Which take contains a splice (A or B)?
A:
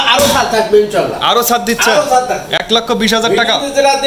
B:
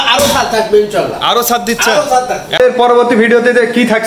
B